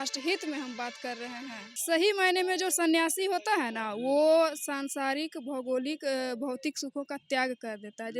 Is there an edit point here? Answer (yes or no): yes